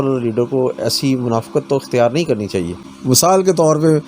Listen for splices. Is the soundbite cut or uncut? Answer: cut